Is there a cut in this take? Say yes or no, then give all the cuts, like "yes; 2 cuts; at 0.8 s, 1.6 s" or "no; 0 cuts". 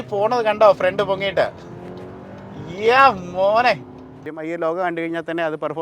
yes; 1 cut; at 4.3 s